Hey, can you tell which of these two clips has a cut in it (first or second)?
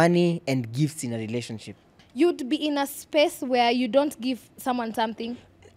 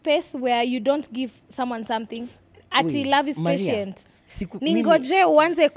first